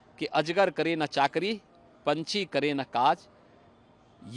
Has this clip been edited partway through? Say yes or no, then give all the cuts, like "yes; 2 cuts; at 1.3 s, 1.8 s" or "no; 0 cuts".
no; 0 cuts